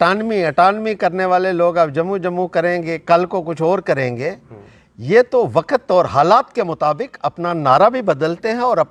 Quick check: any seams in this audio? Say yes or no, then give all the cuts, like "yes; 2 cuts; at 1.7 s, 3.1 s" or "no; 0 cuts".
no; 0 cuts